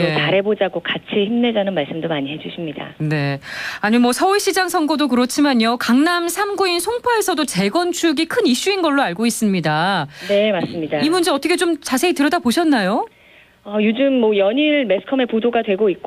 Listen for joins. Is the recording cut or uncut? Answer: uncut